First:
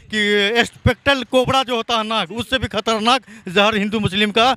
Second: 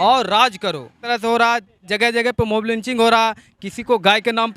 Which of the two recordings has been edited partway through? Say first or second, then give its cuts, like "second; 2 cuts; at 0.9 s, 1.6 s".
second; 1 cut; at 1.0 s